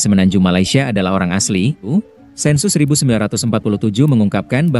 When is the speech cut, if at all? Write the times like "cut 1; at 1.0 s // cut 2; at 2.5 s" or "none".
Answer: cut 1; at 1.8 s